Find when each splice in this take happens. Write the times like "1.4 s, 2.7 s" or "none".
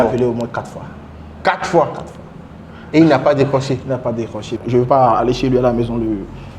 4.4 s